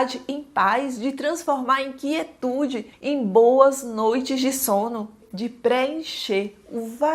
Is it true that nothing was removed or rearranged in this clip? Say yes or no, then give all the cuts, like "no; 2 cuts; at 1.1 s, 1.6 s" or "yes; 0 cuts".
yes; 0 cuts